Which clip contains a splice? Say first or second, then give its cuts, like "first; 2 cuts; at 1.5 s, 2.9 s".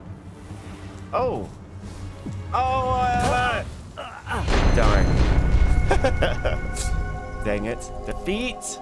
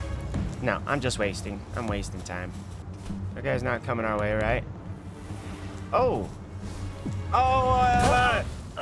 second; 1 cut; at 2.8 s